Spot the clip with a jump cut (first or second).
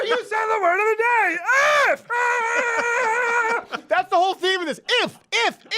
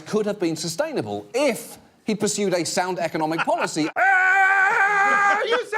second